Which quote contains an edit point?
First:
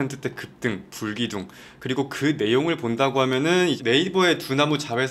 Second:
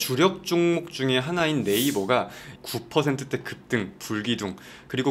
first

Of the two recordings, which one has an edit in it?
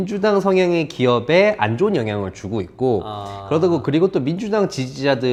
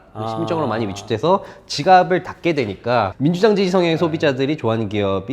second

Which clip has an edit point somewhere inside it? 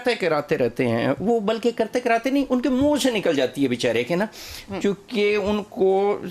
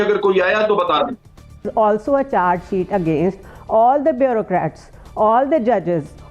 second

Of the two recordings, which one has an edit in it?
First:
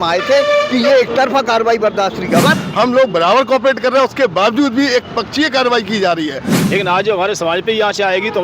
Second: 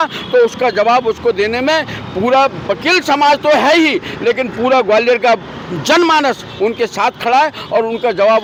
first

